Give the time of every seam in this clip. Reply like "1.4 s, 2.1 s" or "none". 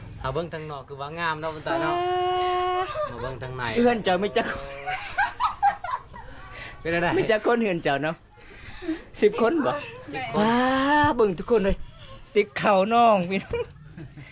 none

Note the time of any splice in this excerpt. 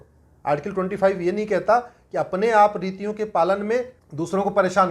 4.0 s

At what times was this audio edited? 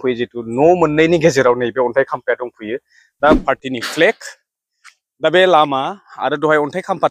3.4 s

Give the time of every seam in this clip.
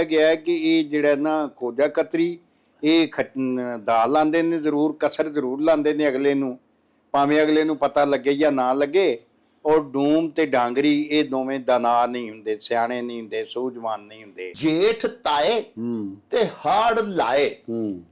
14.5 s

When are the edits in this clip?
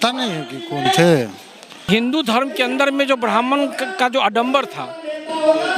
1.8 s

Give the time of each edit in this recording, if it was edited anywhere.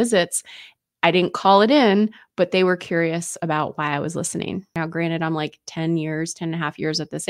4.8 s

